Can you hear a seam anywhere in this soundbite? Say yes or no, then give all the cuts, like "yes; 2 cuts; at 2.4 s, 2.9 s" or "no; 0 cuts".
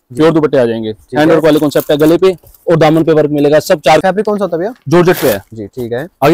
yes; 1 cut; at 4.0 s